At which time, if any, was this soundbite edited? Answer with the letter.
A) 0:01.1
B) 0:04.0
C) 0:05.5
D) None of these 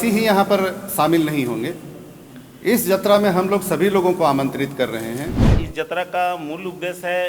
C